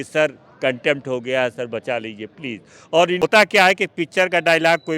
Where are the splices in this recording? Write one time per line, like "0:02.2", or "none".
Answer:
0:03.2